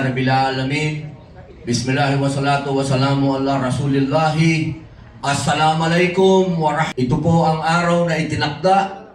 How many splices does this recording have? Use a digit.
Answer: 1